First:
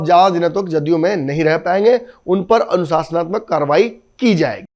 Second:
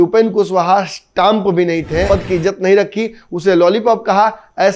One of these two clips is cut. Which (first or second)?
second